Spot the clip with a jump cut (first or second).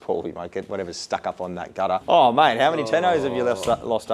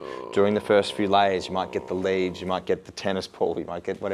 first